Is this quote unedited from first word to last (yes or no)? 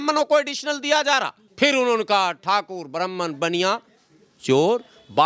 no